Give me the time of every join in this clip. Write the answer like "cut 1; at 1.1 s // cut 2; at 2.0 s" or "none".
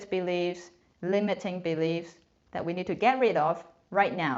none